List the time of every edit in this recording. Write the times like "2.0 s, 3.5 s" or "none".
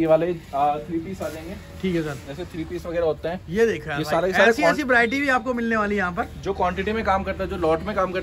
none